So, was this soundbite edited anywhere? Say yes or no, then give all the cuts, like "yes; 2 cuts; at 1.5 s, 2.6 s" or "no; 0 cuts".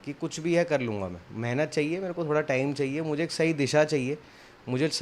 no; 0 cuts